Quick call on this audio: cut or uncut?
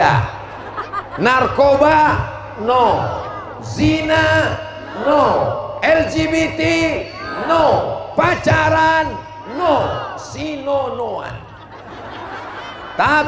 uncut